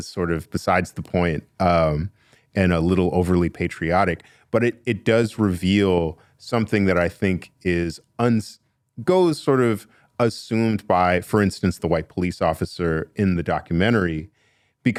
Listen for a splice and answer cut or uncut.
uncut